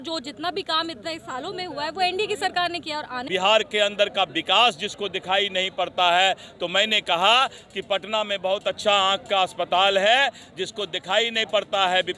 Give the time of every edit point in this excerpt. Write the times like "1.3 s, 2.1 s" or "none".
3.2 s

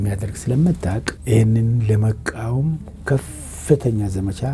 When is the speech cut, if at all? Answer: 1.1 s

